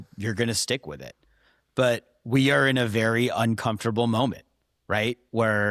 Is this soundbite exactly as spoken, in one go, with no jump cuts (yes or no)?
yes